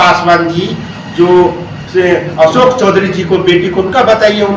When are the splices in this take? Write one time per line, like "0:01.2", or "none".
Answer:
none